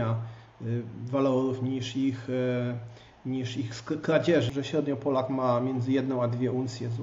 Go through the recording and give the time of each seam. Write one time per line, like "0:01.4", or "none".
0:04.5